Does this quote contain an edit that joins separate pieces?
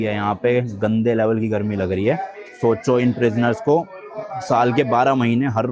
no; 0 cuts

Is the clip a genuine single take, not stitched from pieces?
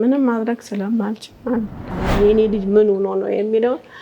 no; 1 cut; at 1.9 s

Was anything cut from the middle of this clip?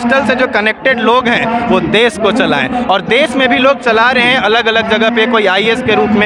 no; 0 cuts

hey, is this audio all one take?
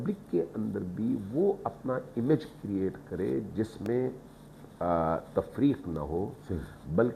yes; 0 cuts

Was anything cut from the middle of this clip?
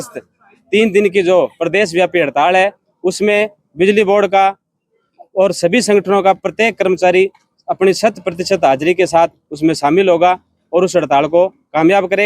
no; 0 cuts

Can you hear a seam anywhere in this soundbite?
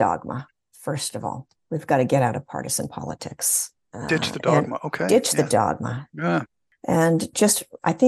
yes; 1 cut; at 6.7 s

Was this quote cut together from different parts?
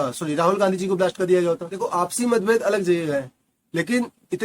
yes; 1 cut; at 1.8 s

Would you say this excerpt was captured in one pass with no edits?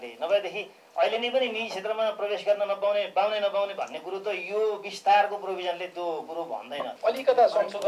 no; 1 cut; at 6.9 s

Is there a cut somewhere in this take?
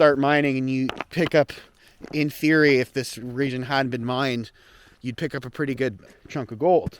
yes; 2 cuts; at 1.0 s, 6.0 s

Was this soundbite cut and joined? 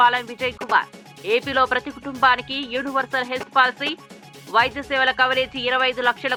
no; 0 cuts

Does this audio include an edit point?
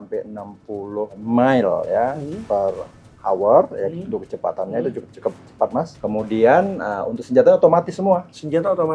yes; 2 cuts; at 1.2 s, 5.9 s

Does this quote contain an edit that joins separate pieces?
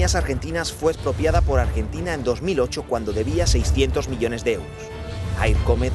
yes; 1 cut; at 1.8 s

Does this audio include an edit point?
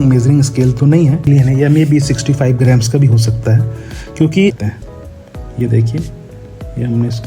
yes; 2 cuts; at 1.3 s, 4.6 s

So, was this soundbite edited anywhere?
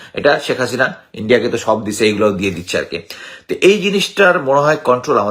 no; 0 cuts

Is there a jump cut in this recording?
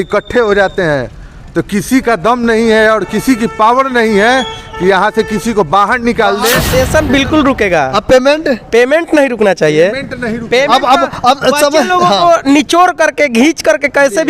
yes; 1 cut; at 6.7 s

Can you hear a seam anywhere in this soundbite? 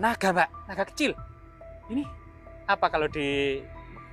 no; 0 cuts

